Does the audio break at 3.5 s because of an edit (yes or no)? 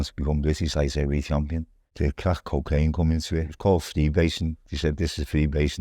yes